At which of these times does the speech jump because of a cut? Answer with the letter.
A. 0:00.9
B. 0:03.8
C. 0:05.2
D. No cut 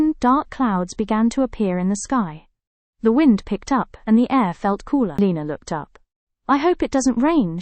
C